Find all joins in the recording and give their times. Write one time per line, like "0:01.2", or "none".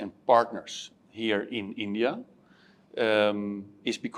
none

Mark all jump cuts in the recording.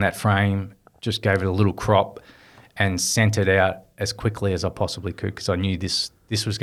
none

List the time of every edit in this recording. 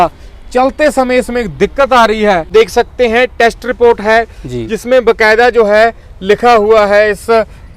0:02.5

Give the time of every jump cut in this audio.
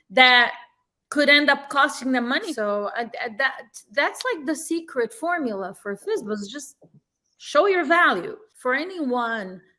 0:02.5
0:08.4

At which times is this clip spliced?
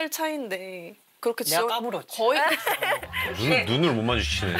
0:03.1

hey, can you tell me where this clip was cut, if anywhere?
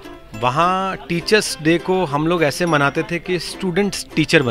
none

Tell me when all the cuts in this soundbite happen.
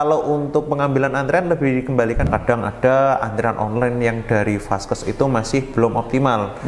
0:02.3

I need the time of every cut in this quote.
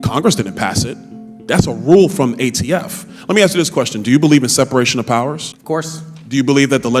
0:05.5

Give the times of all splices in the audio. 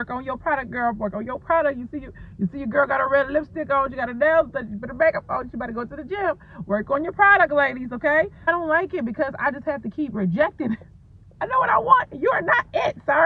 0:08.5

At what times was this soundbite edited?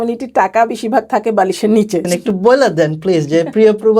0:02.1

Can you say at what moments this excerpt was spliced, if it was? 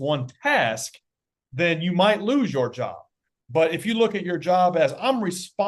none

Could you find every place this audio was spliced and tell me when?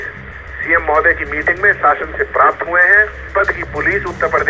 0:03.3

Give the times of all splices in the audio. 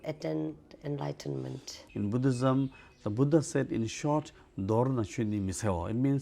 0:01.9

